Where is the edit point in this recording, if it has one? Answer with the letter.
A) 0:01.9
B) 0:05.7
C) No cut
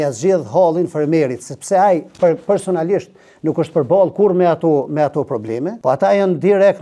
B